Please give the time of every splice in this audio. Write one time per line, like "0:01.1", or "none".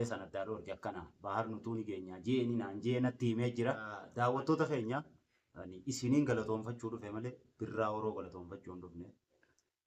0:04.0